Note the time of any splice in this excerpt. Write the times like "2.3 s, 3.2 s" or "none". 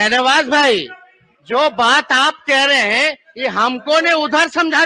none